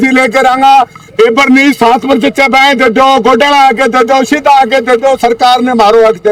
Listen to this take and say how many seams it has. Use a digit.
0